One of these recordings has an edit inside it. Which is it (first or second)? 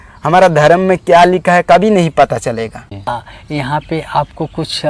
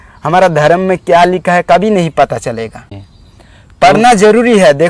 first